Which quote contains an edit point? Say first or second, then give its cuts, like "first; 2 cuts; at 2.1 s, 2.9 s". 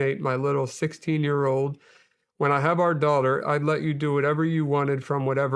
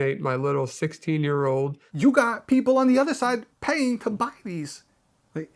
second; 1 cut; at 1.8 s